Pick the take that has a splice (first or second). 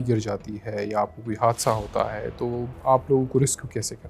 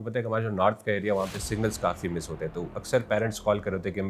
first